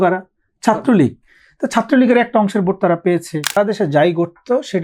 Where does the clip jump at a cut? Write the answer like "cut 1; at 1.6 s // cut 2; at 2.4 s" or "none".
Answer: cut 1; at 3.6 s